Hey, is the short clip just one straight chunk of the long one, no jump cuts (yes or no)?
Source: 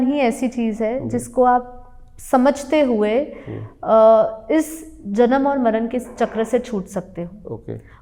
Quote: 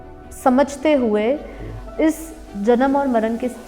no